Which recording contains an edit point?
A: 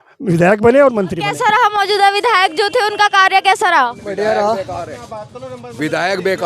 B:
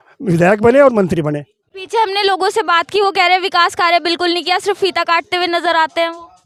A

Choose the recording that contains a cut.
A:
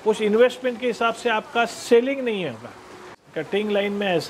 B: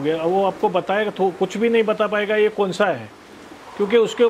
A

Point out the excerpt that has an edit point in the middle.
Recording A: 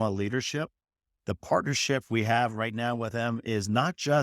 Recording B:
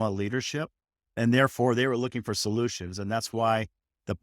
A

